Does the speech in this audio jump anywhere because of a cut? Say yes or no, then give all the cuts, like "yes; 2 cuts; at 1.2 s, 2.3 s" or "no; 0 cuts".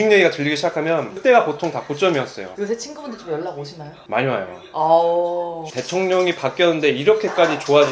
yes; 1 cut; at 2.5 s